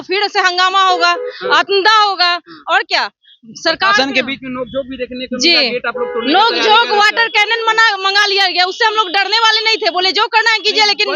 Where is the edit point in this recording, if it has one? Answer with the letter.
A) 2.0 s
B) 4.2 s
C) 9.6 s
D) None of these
D